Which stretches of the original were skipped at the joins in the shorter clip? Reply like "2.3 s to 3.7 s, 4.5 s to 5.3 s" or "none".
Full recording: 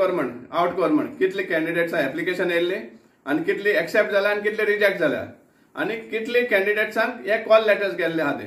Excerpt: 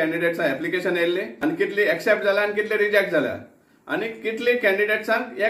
2.8 s to 3.2 s